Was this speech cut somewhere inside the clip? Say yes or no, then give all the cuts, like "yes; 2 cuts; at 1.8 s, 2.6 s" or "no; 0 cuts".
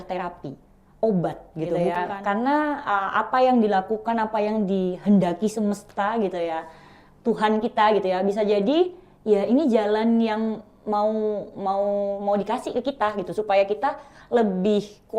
yes; 1 cut; at 1.8 s